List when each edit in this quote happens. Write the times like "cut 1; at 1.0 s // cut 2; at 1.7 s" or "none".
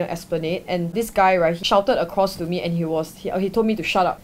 cut 1; at 1.6 s